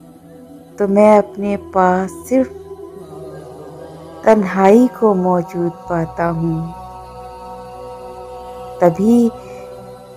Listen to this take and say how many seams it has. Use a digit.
3